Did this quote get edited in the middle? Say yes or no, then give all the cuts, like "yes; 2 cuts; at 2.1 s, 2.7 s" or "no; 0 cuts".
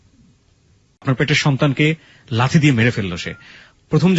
yes; 1 cut; at 1.0 s